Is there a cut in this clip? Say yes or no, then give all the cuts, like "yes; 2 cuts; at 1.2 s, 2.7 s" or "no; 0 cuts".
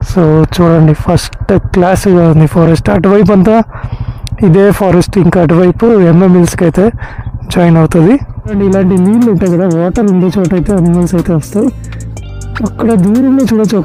yes; 1 cut; at 8.5 s